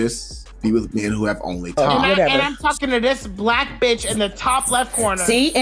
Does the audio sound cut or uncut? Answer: cut